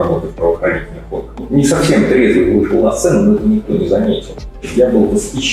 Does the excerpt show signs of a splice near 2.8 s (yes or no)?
no